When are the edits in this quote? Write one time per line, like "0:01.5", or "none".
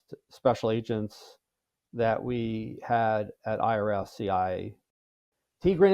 0:04.9